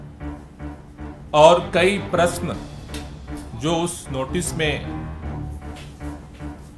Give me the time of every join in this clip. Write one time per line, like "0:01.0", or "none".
0:01.3
0:04.8